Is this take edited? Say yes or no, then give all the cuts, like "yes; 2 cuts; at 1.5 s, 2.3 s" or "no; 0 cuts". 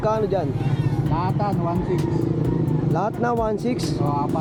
no; 0 cuts